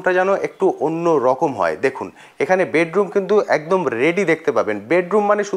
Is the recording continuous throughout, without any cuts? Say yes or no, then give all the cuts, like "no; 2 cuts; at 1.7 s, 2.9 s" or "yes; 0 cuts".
yes; 0 cuts